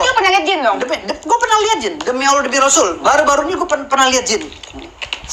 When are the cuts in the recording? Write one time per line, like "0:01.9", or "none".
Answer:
none